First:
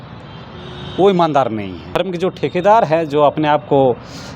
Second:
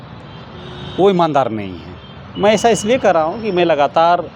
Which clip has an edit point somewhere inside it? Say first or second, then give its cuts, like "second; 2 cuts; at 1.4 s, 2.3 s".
first; 1 cut; at 2.1 s